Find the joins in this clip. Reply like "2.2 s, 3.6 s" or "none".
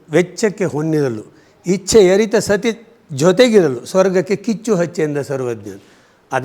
none